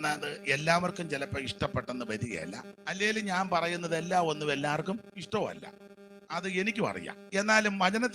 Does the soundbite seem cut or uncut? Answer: cut